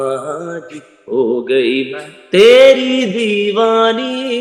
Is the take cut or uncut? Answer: uncut